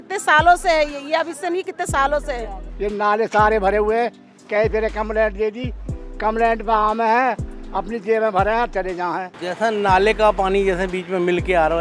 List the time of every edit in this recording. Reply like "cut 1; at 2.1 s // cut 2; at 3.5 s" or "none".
cut 1; at 2.7 s // cut 2; at 9.3 s